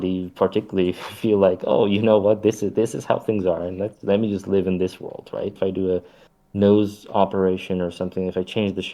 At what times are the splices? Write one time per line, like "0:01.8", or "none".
0:05.6